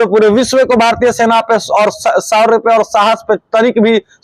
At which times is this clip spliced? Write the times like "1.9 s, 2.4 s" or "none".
none